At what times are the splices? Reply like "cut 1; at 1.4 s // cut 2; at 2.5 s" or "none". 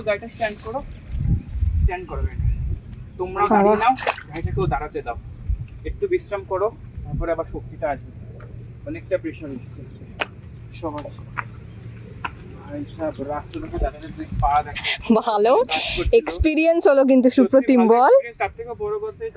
none